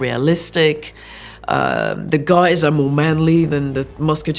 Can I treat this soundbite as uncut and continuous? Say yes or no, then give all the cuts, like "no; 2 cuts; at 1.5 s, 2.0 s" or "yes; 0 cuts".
yes; 0 cuts